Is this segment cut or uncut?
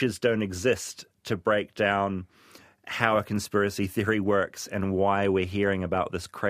uncut